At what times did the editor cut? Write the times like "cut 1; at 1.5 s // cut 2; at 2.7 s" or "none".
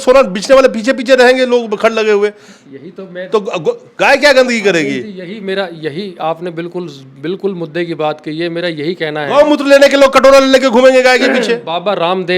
none